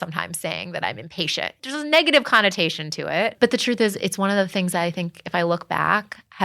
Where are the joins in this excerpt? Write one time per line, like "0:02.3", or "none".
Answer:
0:01.6